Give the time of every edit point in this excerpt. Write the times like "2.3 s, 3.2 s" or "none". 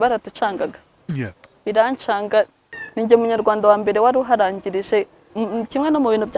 2.7 s, 5.2 s